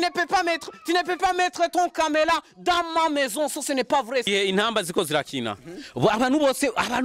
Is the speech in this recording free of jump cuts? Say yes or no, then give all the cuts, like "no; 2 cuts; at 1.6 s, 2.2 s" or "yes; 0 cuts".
no; 1 cut; at 4.3 s